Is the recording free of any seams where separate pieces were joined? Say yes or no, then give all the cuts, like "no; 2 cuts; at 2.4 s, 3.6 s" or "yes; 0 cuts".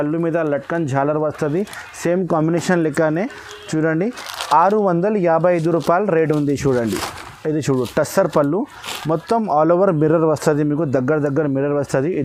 yes; 0 cuts